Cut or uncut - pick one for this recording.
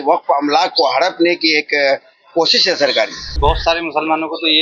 cut